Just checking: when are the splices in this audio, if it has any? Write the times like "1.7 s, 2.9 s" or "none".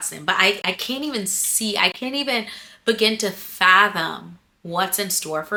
none